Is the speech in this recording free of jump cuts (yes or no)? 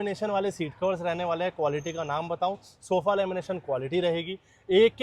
yes